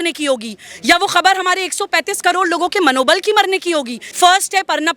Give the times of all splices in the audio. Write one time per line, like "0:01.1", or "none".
0:04.0